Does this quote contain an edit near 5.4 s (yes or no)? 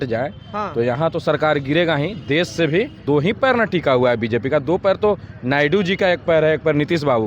no